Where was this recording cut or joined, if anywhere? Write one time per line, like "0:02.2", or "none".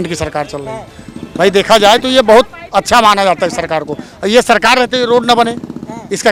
none